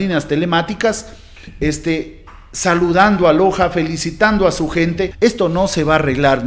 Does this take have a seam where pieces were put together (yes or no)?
yes